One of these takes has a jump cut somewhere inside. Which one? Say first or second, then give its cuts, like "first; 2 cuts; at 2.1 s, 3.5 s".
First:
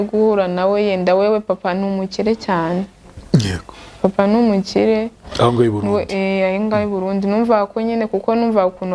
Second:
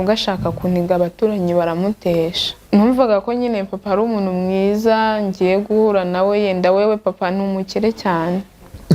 second; 1 cut; at 2.7 s